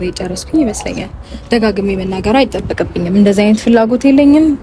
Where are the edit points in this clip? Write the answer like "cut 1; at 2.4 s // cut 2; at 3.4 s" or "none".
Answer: none